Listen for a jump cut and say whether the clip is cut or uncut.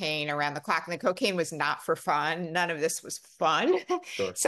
uncut